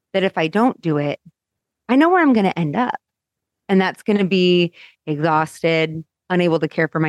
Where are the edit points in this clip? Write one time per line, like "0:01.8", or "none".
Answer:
0:06.1